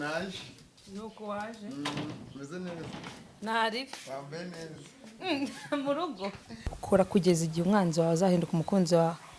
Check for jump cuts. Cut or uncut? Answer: cut